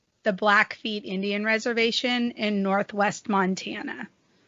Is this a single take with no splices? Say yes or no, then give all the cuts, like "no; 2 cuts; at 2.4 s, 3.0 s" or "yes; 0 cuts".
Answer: yes; 0 cuts